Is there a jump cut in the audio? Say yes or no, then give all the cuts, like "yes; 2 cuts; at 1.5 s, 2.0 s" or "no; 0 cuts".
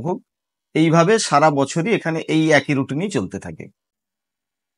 no; 0 cuts